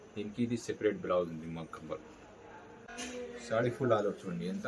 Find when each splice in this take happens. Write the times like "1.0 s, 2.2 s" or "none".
2.9 s